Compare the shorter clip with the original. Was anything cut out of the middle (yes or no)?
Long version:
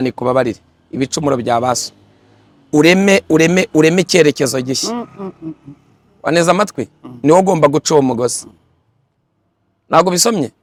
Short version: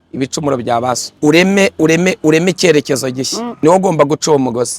yes